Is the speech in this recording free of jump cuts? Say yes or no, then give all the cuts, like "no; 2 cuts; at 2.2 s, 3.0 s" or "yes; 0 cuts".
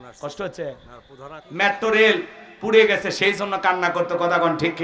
no; 1 cut; at 1.4 s